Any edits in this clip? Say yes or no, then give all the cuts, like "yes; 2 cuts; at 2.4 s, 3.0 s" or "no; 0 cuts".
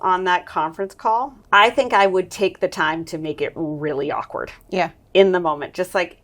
yes; 1 cut; at 1.4 s